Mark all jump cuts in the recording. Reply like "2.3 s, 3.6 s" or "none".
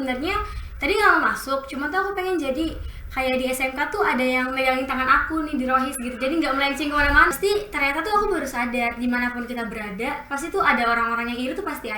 7.3 s